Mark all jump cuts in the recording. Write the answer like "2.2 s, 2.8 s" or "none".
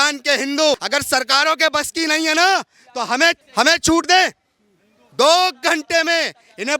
0.8 s, 3.4 s